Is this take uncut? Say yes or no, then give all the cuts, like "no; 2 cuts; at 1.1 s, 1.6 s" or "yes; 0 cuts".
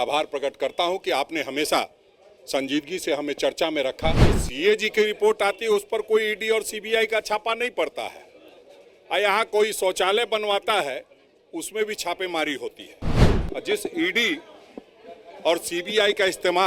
no; 2 cuts; at 4.4 s, 13.3 s